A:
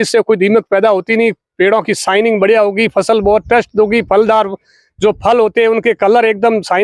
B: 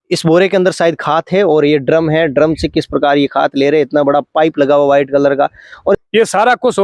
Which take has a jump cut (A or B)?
B